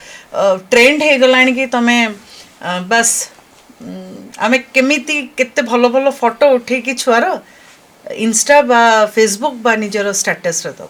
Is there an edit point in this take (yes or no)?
no